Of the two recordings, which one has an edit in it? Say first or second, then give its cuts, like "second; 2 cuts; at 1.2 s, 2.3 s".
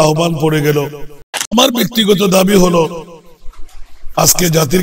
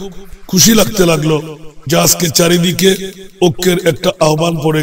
first; 1 cut; at 1.5 s